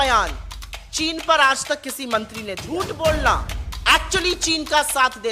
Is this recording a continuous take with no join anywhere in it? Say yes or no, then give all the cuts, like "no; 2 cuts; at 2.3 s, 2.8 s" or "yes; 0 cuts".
no; 1 cut; at 2.6 s